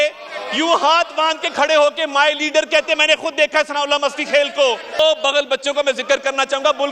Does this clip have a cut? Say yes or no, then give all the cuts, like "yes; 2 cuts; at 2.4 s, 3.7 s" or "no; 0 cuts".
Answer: yes; 1 cut; at 5.0 s